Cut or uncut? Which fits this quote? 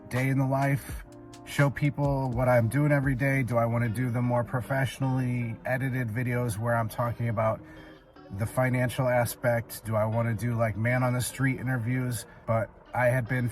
cut